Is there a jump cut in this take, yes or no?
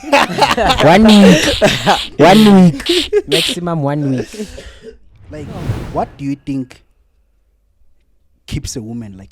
yes